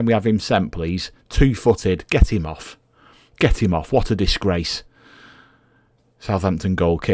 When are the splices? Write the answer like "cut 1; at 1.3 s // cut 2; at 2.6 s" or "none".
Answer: none